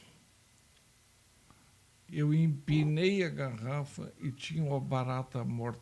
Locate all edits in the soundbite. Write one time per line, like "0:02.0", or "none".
none